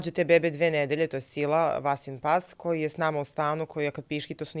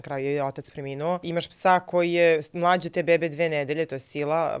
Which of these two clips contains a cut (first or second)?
second